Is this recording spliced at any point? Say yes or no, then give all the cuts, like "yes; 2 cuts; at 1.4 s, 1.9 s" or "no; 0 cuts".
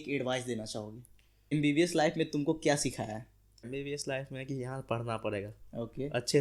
yes; 2 cuts; at 1.5 s, 3.7 s